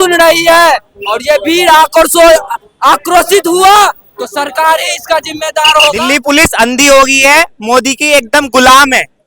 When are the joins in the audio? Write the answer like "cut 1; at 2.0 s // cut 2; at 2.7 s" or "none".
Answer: cut 1; at 6.0 s